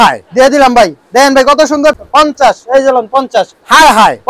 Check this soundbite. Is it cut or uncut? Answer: cut